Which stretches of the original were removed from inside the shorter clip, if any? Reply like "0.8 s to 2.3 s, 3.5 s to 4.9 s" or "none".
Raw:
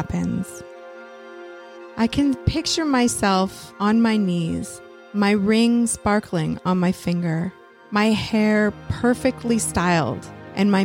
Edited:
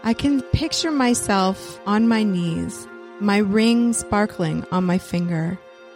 none